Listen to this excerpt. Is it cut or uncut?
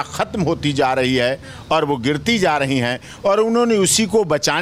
uncut